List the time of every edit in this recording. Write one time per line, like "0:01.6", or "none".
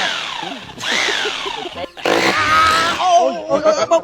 0:01.9

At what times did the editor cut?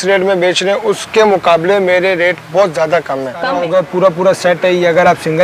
0:03.4

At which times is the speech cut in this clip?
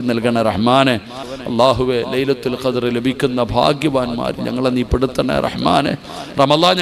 0:01.2

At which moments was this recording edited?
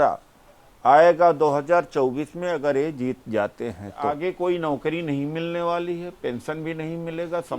0:04.0

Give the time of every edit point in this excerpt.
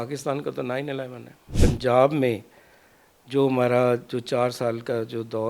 0:01.5

